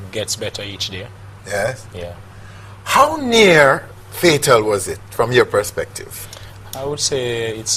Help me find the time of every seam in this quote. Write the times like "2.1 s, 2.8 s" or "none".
1.9 s